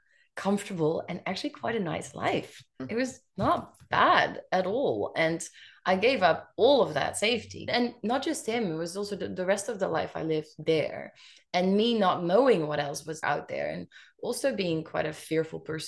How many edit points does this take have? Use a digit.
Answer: 3